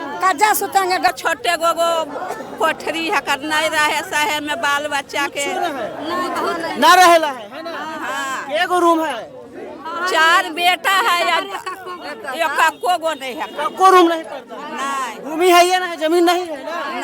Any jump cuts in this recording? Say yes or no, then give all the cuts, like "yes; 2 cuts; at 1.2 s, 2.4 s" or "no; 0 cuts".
yes; 1 cut; at 1.2 s